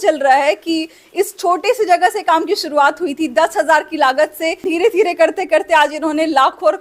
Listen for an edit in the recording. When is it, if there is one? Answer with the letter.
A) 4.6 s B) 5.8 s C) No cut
A